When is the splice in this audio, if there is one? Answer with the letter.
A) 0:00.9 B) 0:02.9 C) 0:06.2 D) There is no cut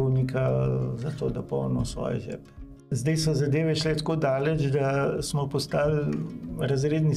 B